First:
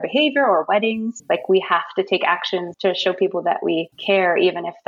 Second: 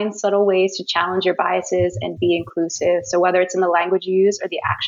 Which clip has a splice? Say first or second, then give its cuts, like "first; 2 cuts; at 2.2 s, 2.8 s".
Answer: first; 3 cuts; at 1.1 s, 2.7 s, 3.9 s